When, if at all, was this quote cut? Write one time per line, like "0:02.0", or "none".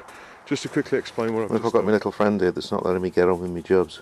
0:01.5